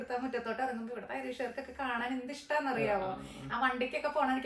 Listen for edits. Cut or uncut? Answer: uncut